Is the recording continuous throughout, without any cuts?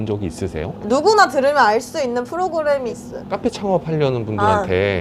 no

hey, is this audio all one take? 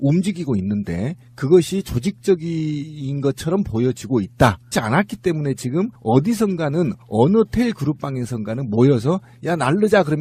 yes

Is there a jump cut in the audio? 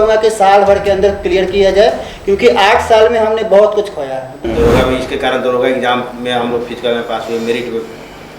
yes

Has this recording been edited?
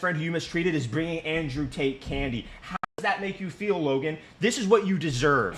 no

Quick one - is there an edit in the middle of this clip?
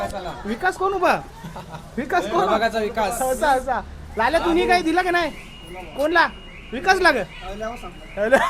no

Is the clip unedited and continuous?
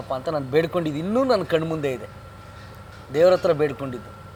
yes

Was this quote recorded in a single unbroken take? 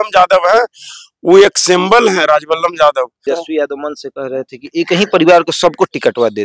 no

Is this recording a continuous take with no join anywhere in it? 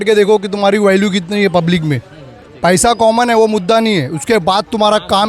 no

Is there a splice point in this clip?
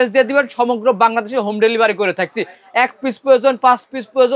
no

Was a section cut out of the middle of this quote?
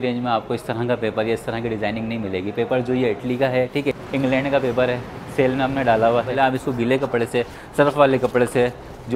yes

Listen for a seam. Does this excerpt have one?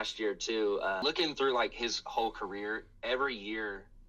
yes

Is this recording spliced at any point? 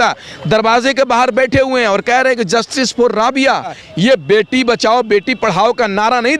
yes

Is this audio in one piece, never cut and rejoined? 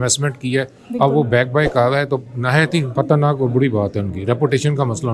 no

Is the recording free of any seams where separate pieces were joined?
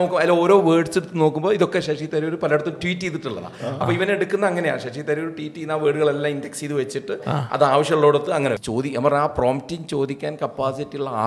no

